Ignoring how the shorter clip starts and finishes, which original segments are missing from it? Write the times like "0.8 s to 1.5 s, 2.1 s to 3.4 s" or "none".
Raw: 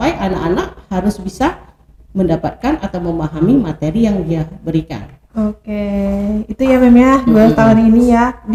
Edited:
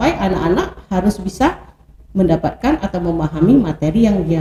none